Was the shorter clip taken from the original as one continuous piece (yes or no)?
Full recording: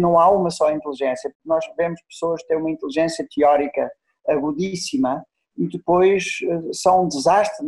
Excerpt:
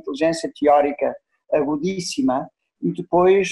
yes